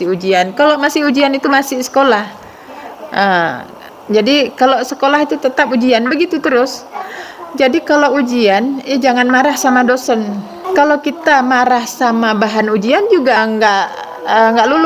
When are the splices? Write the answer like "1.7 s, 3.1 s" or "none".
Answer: 10.5 s, 13.4 s